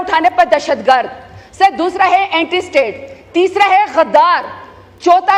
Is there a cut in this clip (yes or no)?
no